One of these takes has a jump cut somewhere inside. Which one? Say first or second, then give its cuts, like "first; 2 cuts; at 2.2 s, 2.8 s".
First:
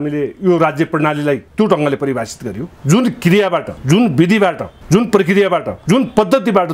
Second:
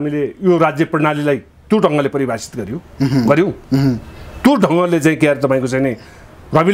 first; 5 cuts; at 1.5 s, 2.6 s, 3.8 s, 4.7 s, 5.7 s